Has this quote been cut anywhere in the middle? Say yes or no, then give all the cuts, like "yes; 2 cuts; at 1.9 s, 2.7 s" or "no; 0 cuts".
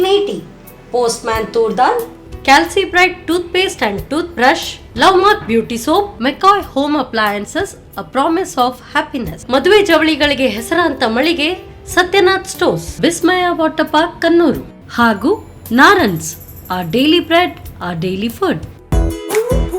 yes; 1 cut; at 18.7 s